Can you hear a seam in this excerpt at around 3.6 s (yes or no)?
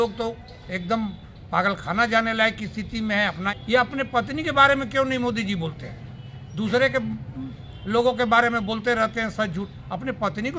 yes